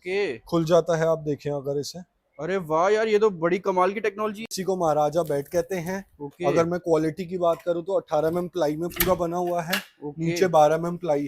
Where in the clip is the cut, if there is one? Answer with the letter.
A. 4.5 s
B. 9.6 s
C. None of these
A